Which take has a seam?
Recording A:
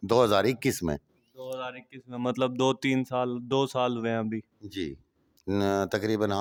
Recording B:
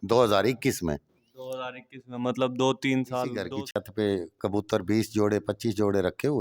B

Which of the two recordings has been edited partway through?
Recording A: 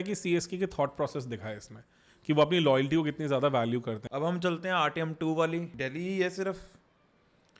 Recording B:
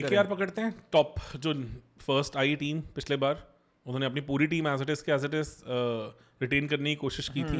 A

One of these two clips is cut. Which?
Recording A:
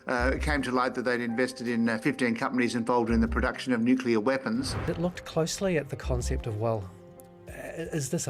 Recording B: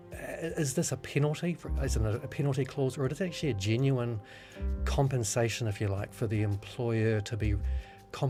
A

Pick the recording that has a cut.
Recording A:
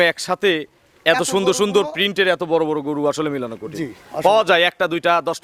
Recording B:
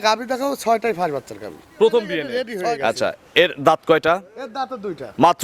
B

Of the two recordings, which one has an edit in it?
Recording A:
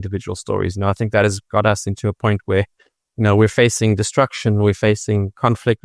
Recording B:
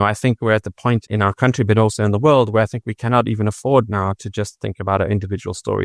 B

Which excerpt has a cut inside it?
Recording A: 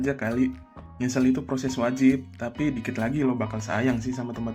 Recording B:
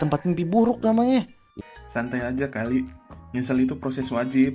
B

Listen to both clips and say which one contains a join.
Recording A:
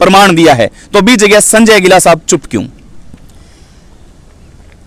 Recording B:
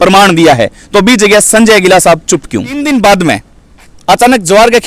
B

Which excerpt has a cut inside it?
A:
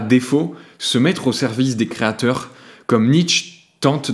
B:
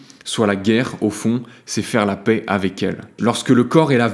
B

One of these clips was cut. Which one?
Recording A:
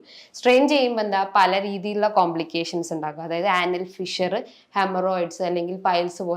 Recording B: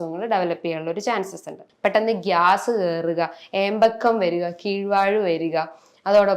B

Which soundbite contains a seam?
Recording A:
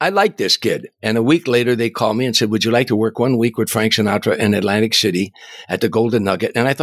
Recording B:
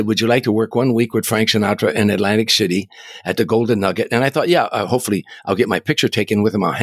A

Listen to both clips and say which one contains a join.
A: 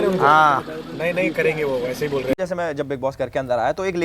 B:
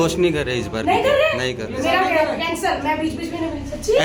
A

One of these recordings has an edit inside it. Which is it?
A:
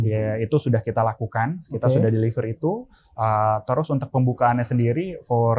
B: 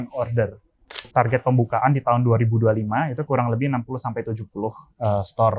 B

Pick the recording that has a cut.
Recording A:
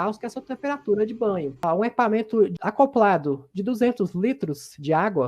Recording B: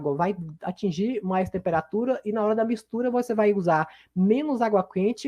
A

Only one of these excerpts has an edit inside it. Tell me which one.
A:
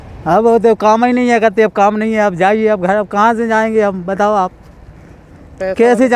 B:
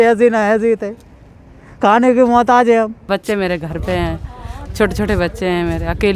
B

